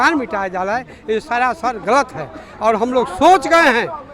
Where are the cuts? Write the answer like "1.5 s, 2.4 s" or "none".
none